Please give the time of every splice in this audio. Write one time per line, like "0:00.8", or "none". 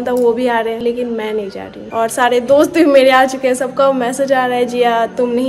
0:01.8